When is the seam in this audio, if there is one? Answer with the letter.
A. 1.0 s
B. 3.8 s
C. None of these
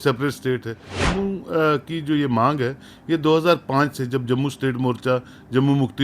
A